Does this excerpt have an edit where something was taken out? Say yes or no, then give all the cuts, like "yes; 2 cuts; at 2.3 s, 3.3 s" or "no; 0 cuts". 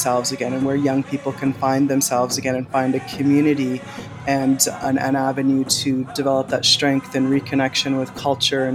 no; 0 cuts